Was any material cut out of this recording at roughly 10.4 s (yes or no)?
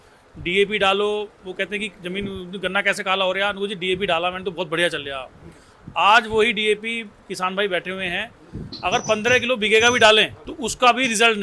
yes